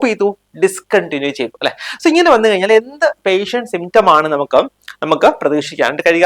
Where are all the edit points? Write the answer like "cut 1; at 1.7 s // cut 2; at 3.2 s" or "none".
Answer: none